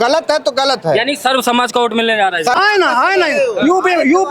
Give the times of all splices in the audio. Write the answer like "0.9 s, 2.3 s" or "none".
2.6 s

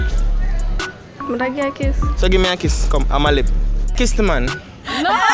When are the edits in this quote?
4.0 s

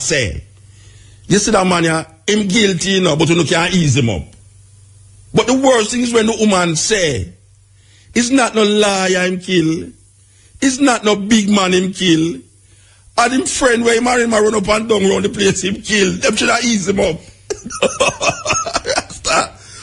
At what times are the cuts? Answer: none

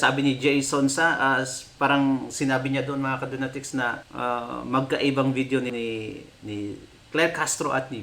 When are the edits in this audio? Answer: 4.0 s, 5.7 s

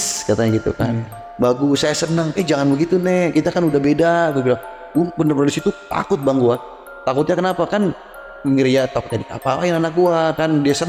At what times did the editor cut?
none

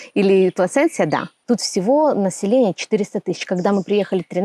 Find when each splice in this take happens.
1.3 s

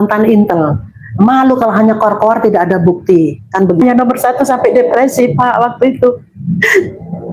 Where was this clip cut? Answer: 3.8 s

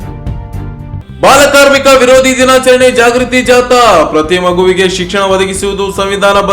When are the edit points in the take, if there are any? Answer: 1.0 s

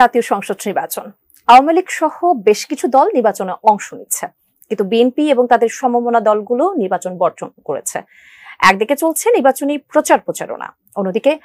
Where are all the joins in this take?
none

